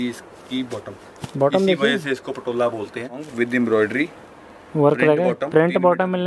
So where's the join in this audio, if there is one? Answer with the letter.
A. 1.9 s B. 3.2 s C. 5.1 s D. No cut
B